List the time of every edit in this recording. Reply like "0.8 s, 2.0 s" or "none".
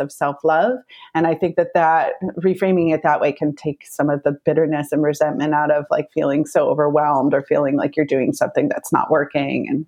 none